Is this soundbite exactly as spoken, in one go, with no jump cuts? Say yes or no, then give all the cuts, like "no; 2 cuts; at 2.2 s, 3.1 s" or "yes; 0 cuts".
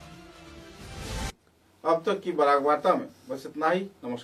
yes; 0 cuts